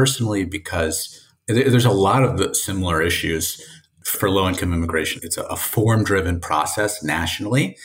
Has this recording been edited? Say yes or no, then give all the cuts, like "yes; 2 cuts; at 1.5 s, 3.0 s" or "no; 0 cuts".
yes; 2 cuts; at 4.1 s, 5.2 s